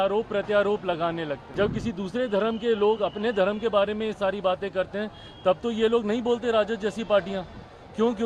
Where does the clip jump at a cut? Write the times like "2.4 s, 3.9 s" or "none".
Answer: 1.4 s